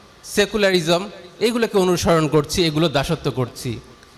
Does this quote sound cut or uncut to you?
uncut